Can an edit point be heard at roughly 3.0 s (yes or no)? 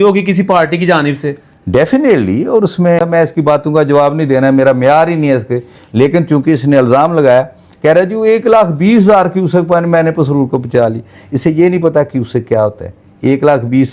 yes